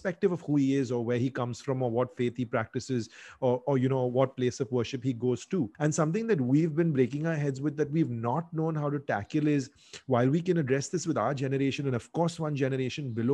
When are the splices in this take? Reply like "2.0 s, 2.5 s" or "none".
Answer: 5.7 s